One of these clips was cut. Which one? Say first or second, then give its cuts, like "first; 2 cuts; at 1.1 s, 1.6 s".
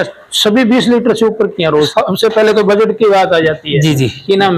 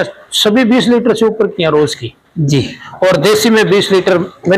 first; 1 cut; at 1.9 s